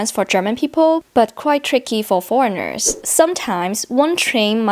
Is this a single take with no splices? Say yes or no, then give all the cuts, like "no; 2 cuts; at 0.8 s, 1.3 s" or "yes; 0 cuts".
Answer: no; 1 cut; at 3.0 s